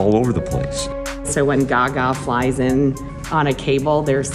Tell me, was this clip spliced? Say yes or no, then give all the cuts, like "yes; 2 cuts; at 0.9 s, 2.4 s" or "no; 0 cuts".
yes; 1 cut; at 1.1 s